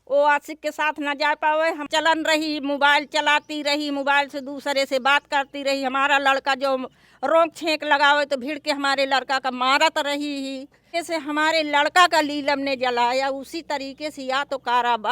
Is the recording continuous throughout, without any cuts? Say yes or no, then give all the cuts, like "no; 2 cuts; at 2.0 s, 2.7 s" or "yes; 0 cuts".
no; 2 cuts; at 1.9 s, 10.8 s